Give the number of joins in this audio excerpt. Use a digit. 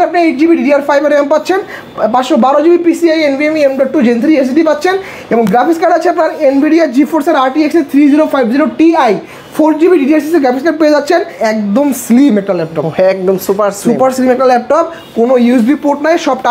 1